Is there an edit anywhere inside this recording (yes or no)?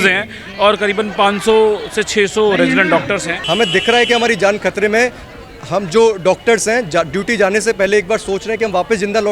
yes